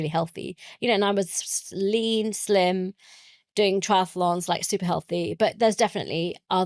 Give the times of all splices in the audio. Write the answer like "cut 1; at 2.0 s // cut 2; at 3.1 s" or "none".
none